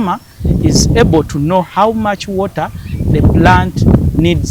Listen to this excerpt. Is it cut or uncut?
uncut